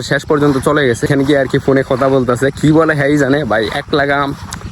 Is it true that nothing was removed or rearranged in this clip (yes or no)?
no